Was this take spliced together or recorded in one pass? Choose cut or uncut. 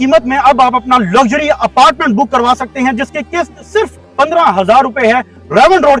uncut